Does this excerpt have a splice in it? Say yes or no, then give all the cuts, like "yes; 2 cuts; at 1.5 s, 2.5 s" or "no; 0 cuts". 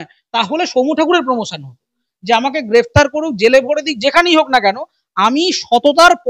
yes; 1 cut; at 2.0 s